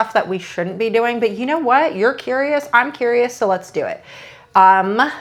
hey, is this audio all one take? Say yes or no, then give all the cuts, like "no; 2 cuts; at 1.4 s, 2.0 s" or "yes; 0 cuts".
yes; 0 cuts